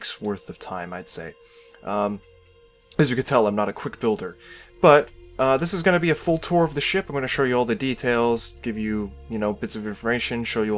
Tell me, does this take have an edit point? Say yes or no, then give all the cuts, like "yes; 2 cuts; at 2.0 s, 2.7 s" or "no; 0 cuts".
yes; 1 cut; at 5.2 s